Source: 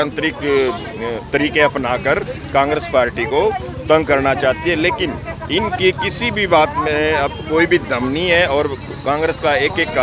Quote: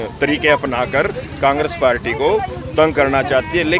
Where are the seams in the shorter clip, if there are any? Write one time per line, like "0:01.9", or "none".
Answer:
none